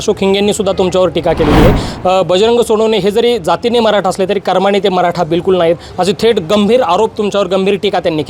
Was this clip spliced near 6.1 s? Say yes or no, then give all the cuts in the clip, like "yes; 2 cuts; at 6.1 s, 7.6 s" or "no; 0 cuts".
no; 0 cuts